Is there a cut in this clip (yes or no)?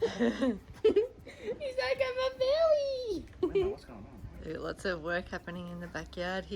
no